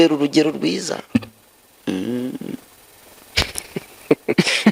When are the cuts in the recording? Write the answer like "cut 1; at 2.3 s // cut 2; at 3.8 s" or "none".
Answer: none